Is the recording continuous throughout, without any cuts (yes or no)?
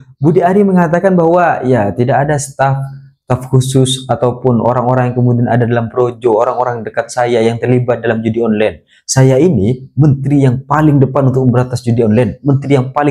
yes